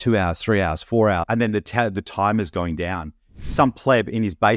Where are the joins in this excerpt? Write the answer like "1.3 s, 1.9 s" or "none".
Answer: 1.2 s, 3.4 s